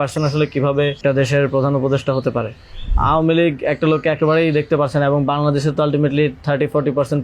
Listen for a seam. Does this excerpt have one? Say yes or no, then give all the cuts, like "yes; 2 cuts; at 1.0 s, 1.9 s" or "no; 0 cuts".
yes; 2 cuts; at 1.0 s, 2.9 s